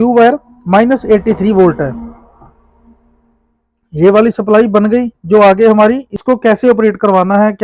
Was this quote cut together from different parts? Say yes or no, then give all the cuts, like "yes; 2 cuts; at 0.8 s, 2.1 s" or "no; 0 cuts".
yes; 1 cut; at 6.1 s